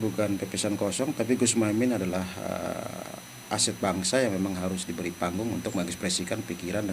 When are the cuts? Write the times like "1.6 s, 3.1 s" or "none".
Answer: none